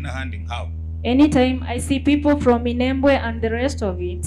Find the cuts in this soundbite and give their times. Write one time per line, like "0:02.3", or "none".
none